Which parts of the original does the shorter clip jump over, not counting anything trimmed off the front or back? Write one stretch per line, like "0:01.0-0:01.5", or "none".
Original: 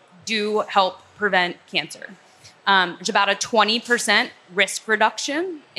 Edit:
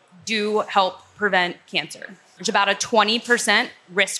0:02.4-0:03.0